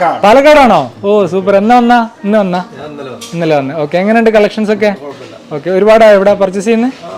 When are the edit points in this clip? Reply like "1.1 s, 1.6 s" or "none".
none